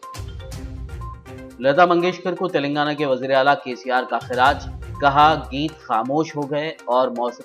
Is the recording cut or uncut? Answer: uncut